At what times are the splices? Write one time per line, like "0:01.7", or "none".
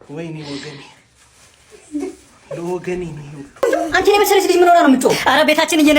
0:03.7